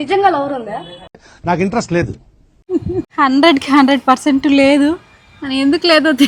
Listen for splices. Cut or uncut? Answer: uncut